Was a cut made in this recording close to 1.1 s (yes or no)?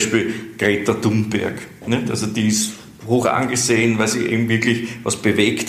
no